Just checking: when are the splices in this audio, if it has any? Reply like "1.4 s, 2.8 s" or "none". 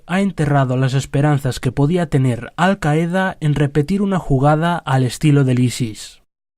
3.7 s